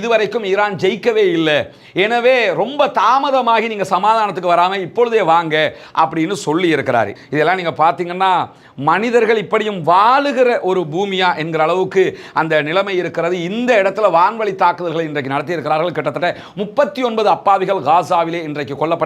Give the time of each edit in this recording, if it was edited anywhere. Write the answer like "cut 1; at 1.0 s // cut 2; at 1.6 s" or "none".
cut 1; at 7.2 s